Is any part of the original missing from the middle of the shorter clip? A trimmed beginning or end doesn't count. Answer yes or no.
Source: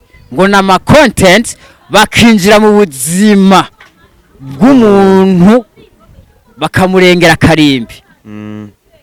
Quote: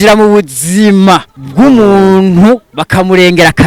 yes